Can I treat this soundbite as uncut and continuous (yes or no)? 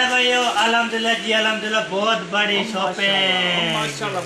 yes